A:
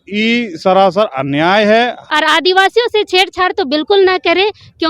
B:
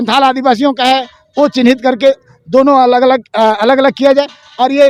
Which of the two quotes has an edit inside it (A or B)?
A